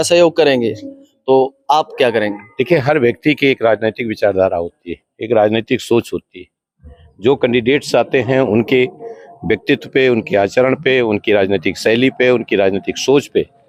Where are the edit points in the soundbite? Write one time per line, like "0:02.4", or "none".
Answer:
none